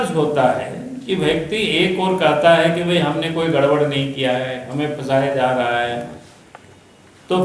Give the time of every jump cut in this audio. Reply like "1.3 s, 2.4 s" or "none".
none